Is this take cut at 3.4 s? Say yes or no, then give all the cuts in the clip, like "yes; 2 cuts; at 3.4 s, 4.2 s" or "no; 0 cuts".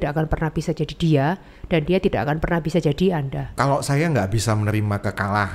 yes; 1 cut; at 3.4 s